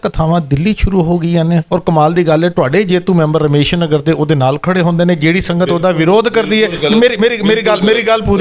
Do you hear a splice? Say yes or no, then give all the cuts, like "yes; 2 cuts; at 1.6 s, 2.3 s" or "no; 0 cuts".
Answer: no; 0 cuts